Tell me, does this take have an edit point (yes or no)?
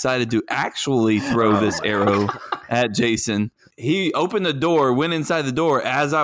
yes